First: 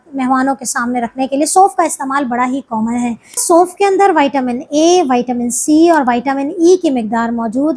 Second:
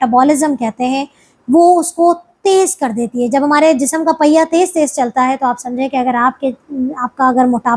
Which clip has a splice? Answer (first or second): first